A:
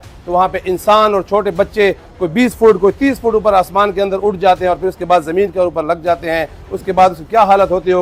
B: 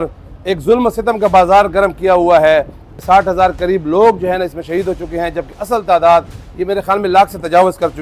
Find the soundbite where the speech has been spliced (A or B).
B